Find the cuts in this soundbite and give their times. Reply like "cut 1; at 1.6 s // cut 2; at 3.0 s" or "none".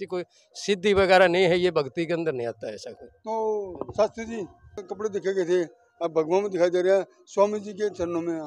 cut 1; at 4.8 s